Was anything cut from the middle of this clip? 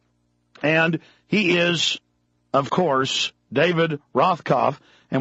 no; 0 cuts

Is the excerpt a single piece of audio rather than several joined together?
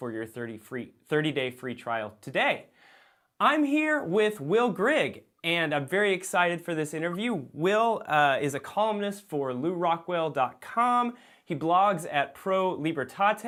yes; 0 cuts

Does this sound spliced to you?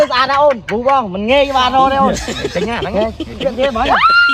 no; 0 cuts

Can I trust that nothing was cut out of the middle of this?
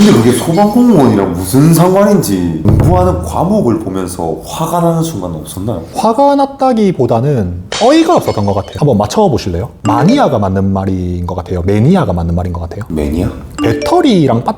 no; 3 cuts; at 2.6 s, 8.7 s, 13.5 s

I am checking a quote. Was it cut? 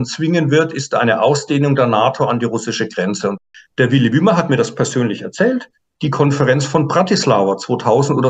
yes; 1 cut; at 3.3 s

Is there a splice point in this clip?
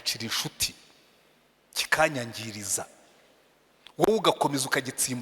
no; 0 cuts

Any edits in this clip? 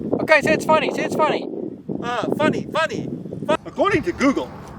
yes; 1 cut; at 3.6 s

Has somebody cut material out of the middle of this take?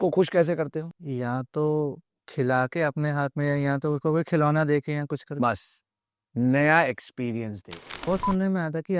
yes; 2 cuts; at 1.0 s, 8.1 s

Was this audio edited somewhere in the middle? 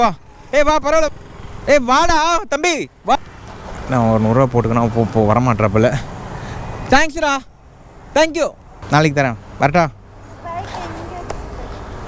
yes; 3 cuts; at 1.1 s, 3.2 s, 8.7 s

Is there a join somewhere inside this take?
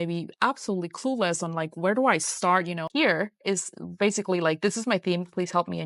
yes; 1 cut; at 2.8 s

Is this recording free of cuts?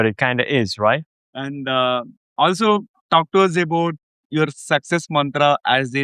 no; 1 cut; at 1.2 s

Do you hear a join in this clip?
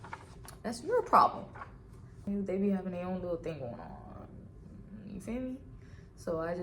yes; 1 cut; at 2.2 s

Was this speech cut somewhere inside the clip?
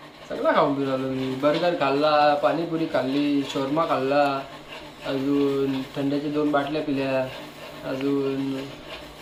no; 0 cuts

